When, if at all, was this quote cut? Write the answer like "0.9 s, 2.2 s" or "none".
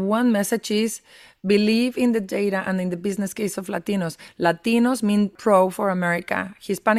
5.3 s